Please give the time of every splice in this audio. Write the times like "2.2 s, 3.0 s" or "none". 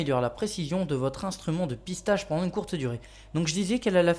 2.9 s